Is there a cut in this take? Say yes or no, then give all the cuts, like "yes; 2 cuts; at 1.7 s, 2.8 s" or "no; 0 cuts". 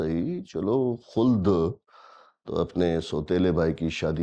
no; 0 cuts